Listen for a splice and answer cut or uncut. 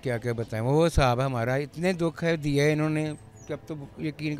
uncut